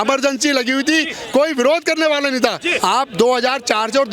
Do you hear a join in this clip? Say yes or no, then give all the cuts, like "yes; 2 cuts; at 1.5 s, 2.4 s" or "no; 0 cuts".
yes; 1 cut; at 2.7 s